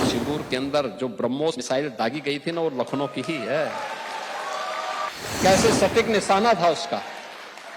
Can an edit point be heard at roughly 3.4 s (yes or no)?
no